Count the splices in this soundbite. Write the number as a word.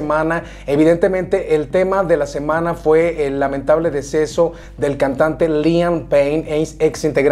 zero